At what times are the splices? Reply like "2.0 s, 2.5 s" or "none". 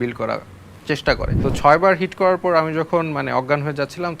1.3 s